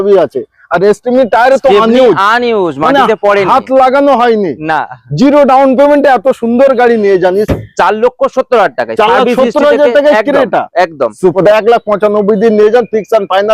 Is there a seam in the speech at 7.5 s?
yes; 2 cuts; at 7.5 s, 11.4 s

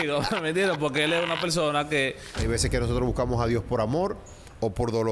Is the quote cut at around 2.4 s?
yes; 1 cut; at 2.4 s

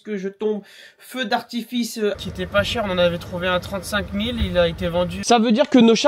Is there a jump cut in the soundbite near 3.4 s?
no; 2 cuts; at 2.2 s, 5.2 s

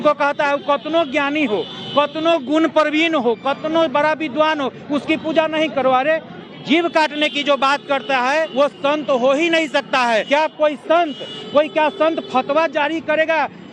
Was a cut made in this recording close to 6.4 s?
yes; 3 cuts; at 6.4 s, 8.5 s, 10.2 s

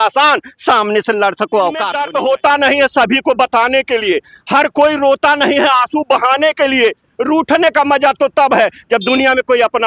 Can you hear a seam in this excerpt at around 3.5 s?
no; 1 cut; at 2.0 s

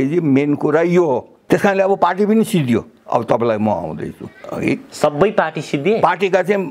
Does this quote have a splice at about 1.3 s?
yes; 1 cut; at 1.3 s

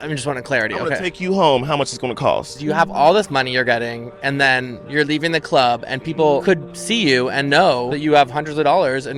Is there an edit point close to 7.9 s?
yes; 3 cuts; at 2.6 s, 6.5 s, 7.9 s

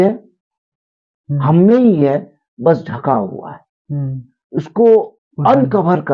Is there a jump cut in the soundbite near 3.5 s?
no; 1 cut; at 5.2 s

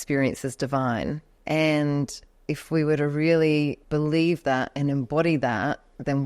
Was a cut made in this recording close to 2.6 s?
no; 2 cuts; at 1.3 s, 3.8 s

